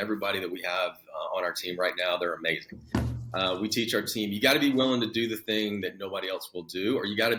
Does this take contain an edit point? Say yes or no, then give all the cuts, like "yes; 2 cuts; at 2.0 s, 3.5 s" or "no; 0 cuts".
no; 0 cuts